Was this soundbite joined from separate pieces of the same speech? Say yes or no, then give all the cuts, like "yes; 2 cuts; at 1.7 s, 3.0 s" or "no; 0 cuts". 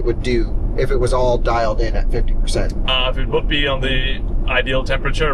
no; 0 cuts